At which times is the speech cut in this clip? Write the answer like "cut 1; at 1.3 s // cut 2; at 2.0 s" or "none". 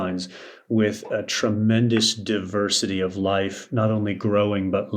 none